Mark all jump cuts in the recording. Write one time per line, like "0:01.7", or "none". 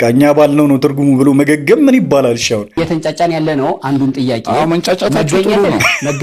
0:02.8